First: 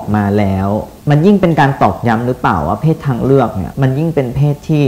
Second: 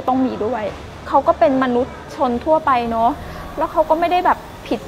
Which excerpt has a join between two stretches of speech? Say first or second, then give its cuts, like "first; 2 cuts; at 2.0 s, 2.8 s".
first; 2 cuts; at 0.9 s, 3.6 s